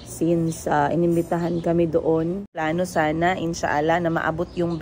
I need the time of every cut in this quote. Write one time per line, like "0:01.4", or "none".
0:02.6